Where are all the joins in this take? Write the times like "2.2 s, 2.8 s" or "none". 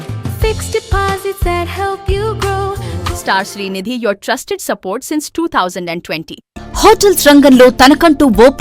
2.9 s, 6.4 s